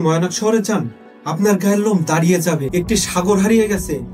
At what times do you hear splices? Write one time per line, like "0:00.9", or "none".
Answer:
0:02.6